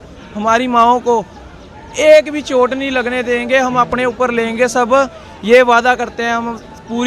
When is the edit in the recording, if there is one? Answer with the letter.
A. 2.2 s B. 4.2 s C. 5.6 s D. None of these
D